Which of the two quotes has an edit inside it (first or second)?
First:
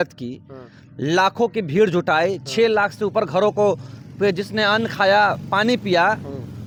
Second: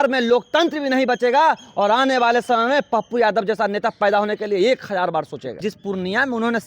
second